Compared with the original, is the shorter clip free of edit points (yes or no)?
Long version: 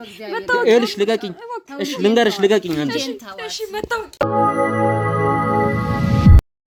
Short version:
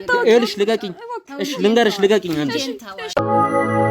no